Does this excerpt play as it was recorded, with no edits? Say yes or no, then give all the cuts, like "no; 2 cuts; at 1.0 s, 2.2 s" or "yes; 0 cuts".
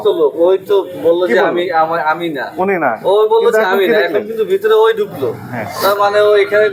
yes; 0 cuts